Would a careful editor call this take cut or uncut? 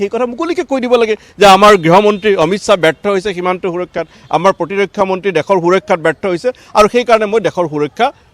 uncut